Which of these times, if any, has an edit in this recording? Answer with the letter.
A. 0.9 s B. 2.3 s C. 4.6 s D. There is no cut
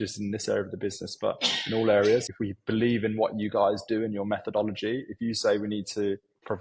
B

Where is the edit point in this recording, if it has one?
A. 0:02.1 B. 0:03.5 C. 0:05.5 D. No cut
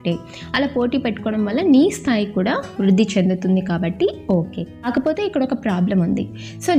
D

